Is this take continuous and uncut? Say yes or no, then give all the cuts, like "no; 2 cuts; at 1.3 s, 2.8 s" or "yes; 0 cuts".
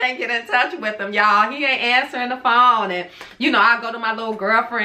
yes; 0 cuts